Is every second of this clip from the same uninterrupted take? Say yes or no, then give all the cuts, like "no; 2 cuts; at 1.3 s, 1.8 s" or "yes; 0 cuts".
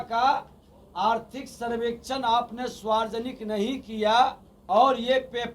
no; 1 cut; at 4.5 s